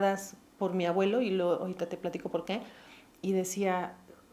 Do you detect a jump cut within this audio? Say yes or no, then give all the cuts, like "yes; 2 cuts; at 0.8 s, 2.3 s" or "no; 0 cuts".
no; 0 cuts